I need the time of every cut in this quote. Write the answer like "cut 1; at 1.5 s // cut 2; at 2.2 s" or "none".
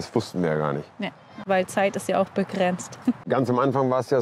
cut 1; at 1.4 s // cut 2; at 3.2 s

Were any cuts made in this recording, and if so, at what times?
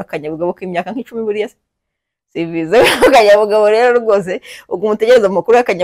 none

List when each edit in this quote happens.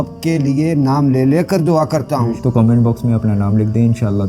cut 1; at 2.4 s

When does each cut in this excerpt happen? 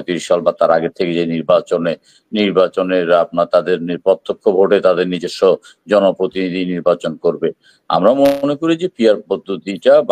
none

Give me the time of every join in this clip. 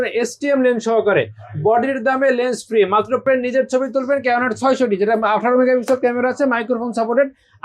cut 1; at 3.3 s

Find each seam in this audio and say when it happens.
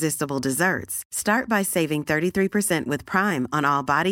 none

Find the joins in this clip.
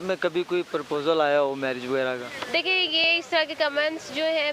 none

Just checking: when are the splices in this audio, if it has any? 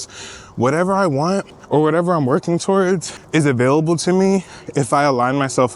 cut 1; at 1.5 s // cut 2; at 3.1 s

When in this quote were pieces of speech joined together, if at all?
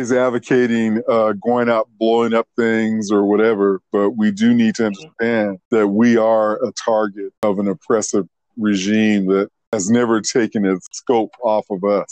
cut 1; at 5.6 s // cut 2; at 7.4 s // cut 3; at 9.7 s // cut 4; at 10.9 s

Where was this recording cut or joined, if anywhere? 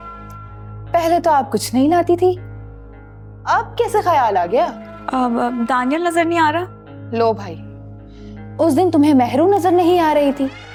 none

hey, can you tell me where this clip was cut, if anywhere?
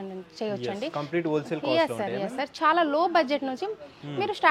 none

